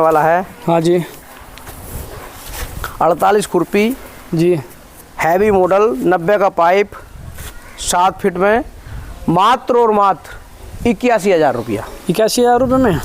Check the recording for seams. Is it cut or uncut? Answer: uncut